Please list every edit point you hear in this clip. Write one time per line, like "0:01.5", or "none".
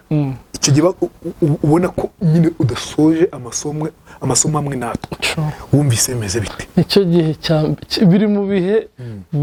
none